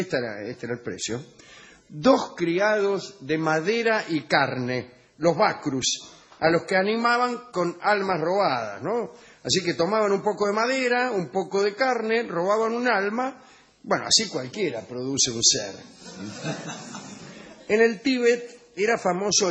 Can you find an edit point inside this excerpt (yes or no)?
no